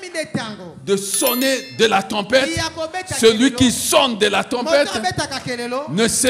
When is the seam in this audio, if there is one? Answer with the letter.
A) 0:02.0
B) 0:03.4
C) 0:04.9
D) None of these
D